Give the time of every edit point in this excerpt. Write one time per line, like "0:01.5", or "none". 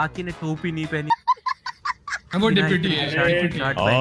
none